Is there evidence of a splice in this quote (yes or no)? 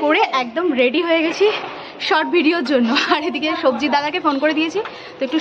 no